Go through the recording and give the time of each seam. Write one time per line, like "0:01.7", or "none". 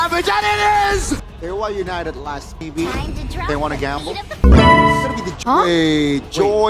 0:01.3
0:05.3

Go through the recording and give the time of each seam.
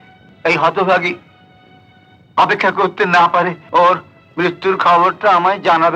0:03.6

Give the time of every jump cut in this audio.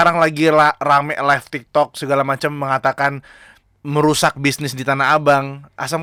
none

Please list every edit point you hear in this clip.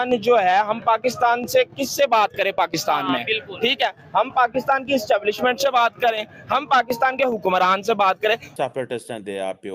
0:08.5

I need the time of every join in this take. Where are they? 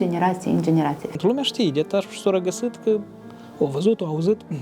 0:01.0

